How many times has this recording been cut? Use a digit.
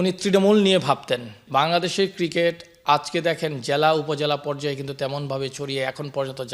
1